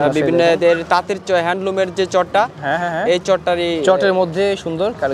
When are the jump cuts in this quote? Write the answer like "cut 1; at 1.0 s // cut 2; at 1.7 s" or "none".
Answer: none